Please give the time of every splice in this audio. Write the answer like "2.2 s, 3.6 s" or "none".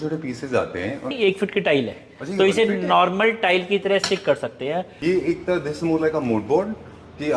1.1 s, 4.9 s